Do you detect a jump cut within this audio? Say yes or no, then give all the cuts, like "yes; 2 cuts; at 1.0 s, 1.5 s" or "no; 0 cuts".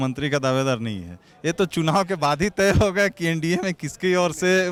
no; 0 cuts